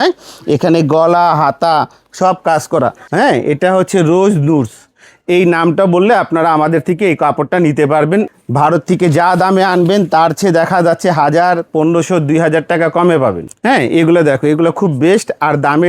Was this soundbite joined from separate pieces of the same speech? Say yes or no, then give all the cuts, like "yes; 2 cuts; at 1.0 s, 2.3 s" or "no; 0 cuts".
yes; 3 cuts; at 3.0 s, 8.3 s, 13.5 s